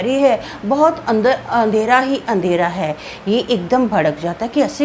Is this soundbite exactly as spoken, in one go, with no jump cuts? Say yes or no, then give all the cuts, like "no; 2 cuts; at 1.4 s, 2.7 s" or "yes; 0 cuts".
yes; 0 cuts